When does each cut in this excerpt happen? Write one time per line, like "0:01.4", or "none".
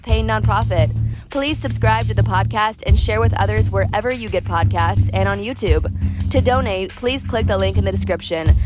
none